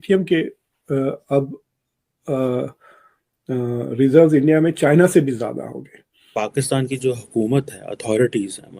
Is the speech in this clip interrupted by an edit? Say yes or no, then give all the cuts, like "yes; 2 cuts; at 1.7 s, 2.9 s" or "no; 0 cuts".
yes; 1 cut; at 6.3 s